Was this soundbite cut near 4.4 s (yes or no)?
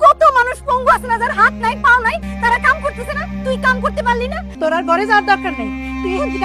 yes